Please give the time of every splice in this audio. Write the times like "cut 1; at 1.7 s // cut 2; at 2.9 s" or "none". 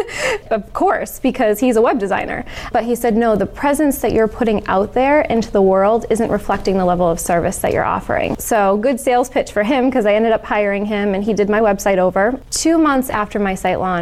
cut 1; at 8.4 s // cut 2; at 12.4 s